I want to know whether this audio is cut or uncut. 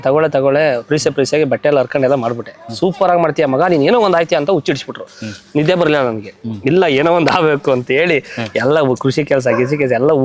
uncut